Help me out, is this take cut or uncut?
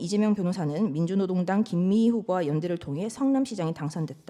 uncut